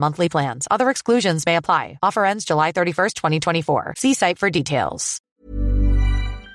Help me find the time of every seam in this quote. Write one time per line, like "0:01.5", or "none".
0:05.1